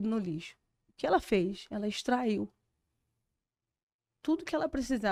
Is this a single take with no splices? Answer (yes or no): yes